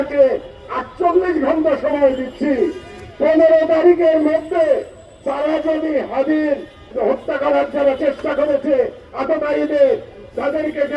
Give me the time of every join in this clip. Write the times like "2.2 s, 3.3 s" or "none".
6.9 s